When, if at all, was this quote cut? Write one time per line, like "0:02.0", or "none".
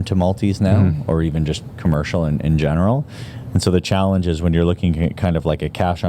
none